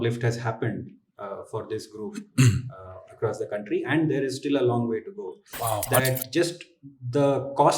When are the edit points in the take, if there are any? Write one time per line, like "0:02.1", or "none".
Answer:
0:06.0